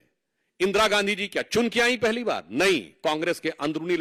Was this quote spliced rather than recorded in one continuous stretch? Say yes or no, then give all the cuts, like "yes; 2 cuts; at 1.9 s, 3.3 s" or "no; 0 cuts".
no; 0 cuts